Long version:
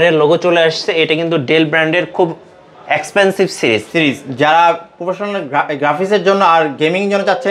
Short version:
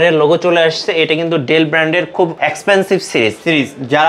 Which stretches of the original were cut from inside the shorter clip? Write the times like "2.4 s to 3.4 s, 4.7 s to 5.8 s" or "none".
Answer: 2.3 s to 2.8 s